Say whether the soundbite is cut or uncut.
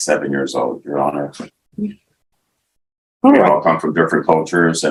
uncut